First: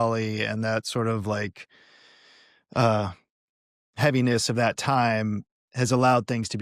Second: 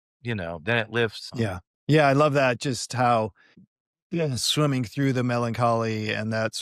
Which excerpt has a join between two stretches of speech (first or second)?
second